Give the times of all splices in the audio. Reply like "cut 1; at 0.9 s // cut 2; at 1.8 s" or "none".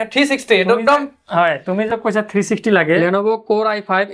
cut 1; at 3.0 s